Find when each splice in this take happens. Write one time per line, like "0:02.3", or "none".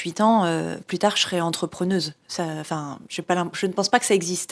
none